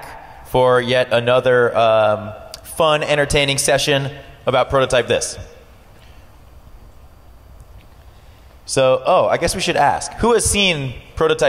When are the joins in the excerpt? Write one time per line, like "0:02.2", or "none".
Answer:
none